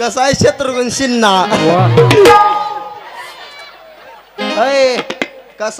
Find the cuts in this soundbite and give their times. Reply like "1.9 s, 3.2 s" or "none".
3.0 s